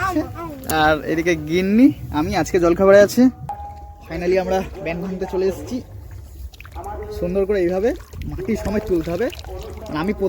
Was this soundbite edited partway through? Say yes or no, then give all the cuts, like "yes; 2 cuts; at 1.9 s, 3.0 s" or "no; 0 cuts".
yes; 1 cut; at 3.5 s